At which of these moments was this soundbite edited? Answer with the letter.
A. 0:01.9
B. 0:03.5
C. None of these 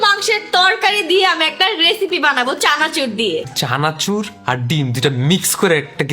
B